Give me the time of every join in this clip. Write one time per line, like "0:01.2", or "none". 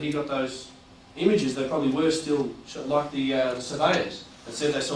none

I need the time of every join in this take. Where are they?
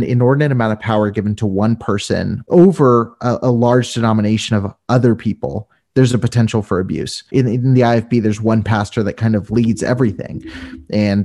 0:02.4
0:07.3

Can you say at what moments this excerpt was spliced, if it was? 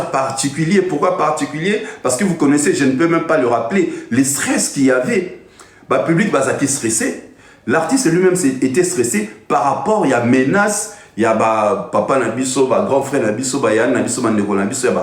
none

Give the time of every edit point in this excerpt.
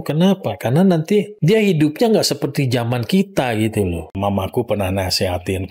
0:01.3
0:03.9

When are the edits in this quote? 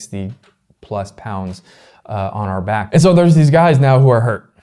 0:02.9

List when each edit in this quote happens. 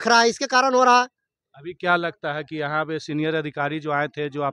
none

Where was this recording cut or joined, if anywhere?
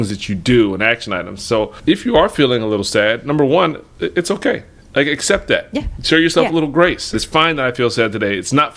0:01.7
0:07.1

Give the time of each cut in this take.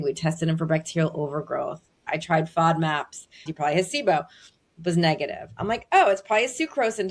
0:02.1
0:03.5

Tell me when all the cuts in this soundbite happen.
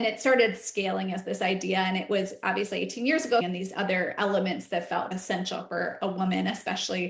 0:03.4

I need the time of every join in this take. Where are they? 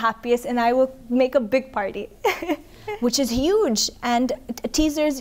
0:02.7

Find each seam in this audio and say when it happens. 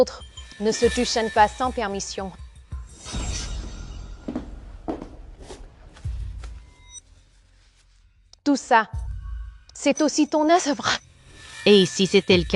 none

